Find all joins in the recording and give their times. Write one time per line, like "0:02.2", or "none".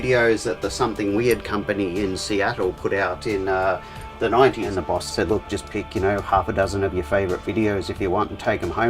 0:04.7